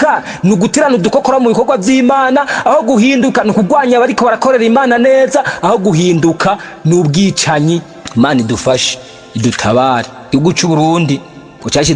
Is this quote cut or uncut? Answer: cut